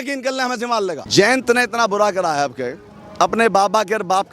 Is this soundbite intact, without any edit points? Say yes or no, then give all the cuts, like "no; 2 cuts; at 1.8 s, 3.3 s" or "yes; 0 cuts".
no; 1 cut; at 1.0 s